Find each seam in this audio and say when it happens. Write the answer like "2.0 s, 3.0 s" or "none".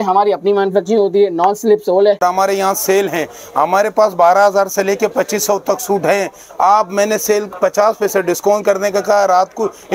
2.2 s

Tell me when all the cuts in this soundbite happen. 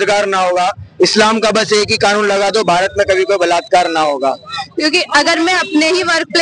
4.7 s

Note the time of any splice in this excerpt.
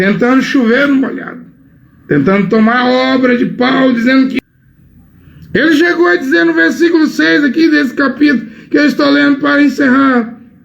4.4 s

